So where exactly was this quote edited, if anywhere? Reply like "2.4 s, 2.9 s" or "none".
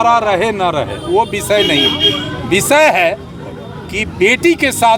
none